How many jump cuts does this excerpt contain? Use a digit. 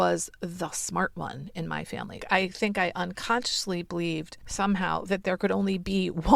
2